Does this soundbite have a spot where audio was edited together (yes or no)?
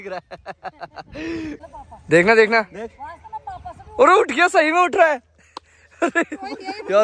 yes